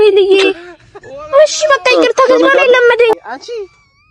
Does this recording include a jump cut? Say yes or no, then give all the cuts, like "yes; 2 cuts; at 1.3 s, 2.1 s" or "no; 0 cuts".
yes; 1 cut; at 3.1 s